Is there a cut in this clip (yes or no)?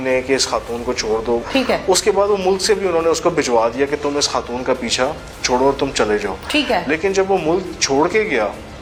no